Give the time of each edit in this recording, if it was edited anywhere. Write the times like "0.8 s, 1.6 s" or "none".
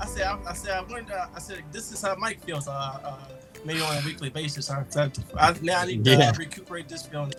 none